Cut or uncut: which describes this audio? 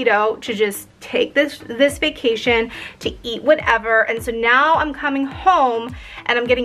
uncut